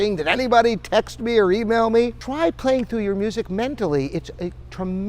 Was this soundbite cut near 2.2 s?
yes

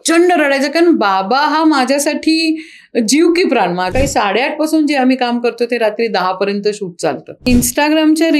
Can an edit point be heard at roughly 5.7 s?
no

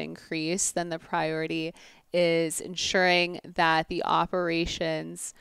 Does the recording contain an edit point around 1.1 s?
no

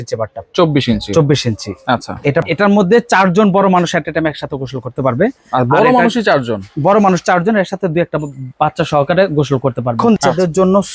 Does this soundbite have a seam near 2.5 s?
yes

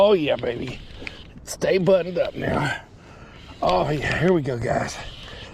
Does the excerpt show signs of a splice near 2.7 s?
no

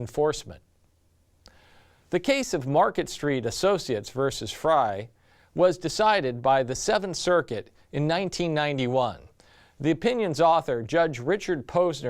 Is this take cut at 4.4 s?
no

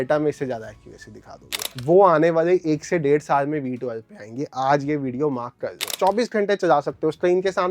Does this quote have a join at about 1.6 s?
yes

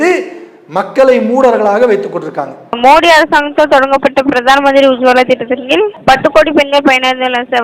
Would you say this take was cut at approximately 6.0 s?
no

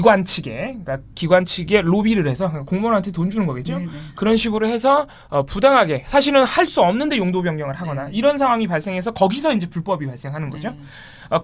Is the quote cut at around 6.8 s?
yes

